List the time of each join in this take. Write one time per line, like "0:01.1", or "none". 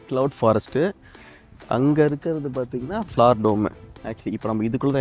none